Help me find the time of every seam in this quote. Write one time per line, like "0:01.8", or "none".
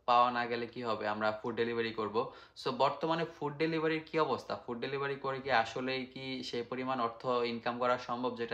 none